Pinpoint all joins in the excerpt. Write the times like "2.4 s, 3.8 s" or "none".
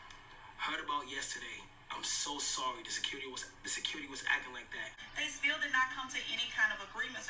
5.0 s